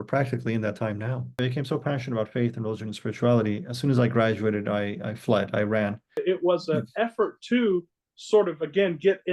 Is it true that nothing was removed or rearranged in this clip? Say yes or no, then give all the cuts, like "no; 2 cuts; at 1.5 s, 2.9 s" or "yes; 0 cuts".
no; 2 cuts; at 1.4 s, 6.2 s